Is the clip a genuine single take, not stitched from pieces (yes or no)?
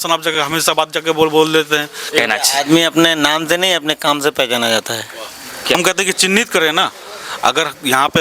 no